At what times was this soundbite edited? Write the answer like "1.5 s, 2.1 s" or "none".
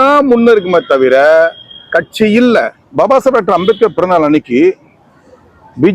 2.8 s